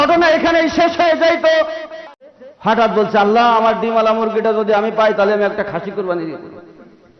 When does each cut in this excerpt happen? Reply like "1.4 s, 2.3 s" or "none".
2.1 s

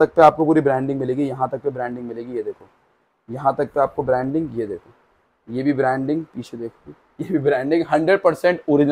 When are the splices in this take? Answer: none

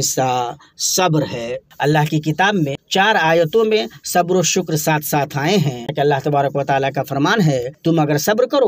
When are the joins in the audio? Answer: 1.6 s, 2.8 s, 5.9 s, 7.7 s

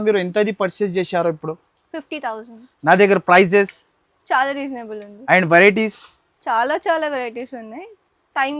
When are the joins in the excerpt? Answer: none

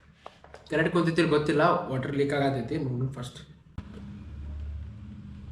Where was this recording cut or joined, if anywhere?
3.7 s

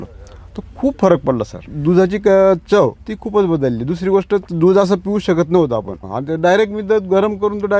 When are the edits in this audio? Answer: 1.7 s, 3.0 s, 6.0 s

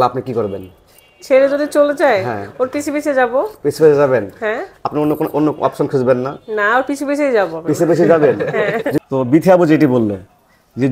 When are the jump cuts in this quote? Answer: 9.0 s

